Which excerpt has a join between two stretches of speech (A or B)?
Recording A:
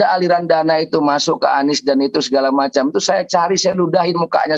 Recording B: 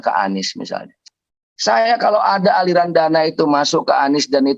B